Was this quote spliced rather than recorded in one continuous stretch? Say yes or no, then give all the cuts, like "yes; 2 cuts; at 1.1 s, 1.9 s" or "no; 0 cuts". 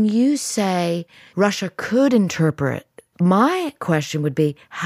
yes; 2 cuts; at 1.2 s, 3.0 s